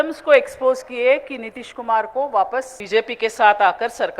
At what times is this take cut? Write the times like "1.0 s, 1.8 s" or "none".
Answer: 2.8 s